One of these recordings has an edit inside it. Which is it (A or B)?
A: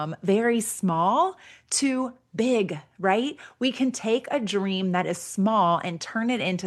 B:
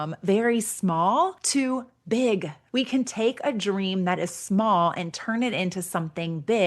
B